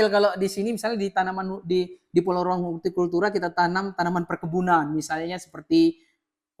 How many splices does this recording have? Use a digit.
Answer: 0